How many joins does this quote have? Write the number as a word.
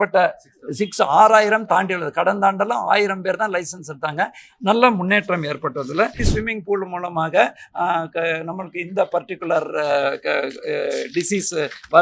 one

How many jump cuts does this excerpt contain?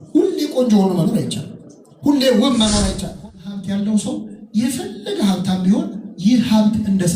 one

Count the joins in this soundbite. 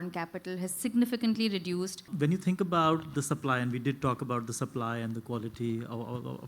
one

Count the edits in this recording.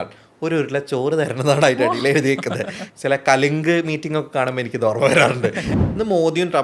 two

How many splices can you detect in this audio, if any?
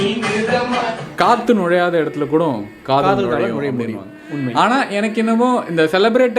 one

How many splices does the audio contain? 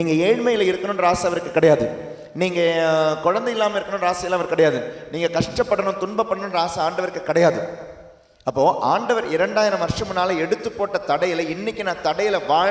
zero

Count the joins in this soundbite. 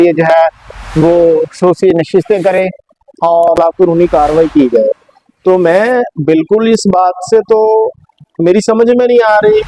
one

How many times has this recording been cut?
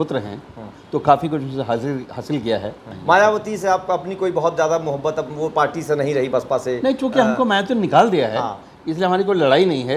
one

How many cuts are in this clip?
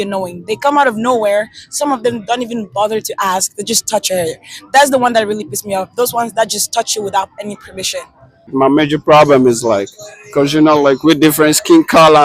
one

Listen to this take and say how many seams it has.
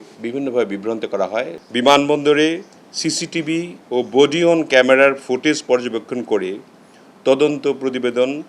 one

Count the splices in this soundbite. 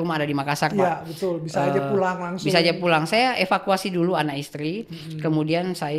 zero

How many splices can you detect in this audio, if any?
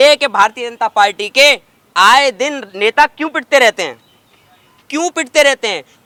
zero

